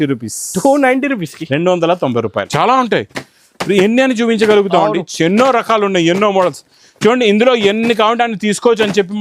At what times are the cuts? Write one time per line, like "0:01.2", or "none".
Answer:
0:02.5